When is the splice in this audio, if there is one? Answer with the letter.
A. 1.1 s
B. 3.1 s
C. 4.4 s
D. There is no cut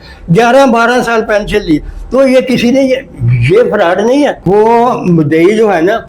C